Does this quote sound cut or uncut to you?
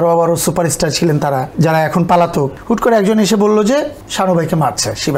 cut